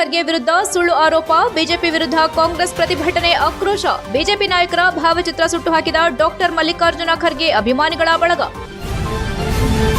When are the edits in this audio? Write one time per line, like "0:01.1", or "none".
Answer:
0:08.6